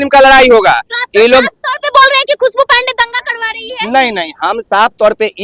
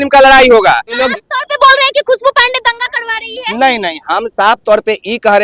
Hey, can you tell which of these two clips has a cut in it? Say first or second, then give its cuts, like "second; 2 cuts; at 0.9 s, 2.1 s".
second; 1 cut; at 1.0 s